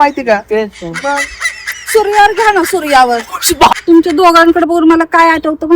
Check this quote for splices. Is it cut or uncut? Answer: cut